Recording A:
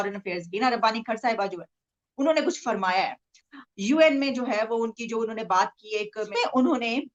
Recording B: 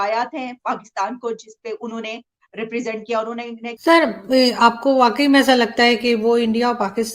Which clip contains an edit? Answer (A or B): B